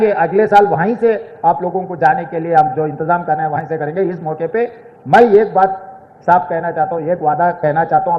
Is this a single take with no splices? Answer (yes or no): yes